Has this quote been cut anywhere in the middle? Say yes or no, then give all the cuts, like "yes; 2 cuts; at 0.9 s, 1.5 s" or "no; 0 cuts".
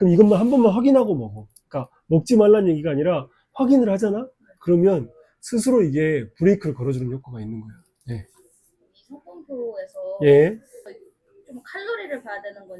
yes; 1 cut; at 11.0 s